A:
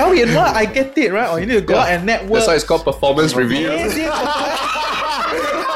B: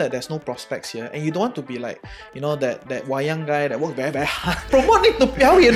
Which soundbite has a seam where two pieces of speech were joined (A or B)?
B